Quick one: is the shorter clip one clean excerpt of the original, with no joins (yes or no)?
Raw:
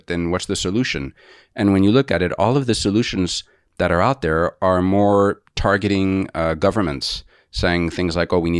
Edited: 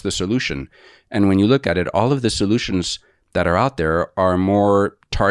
yes